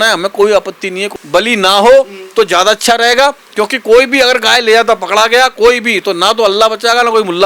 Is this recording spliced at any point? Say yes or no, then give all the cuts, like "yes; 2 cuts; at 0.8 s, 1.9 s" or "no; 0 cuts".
yes; 1 cut; at 1.0 s